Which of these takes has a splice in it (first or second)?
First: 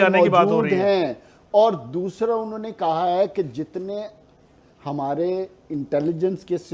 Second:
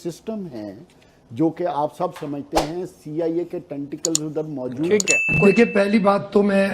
second